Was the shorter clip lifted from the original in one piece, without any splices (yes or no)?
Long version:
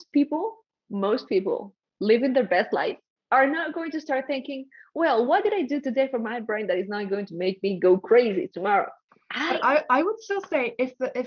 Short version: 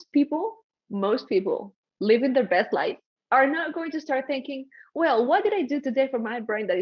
yes